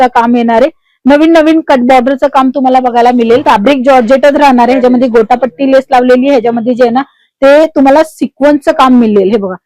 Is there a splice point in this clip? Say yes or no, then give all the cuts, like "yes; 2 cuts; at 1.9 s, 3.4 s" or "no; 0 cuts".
yes; 1 cut; at 3.4 s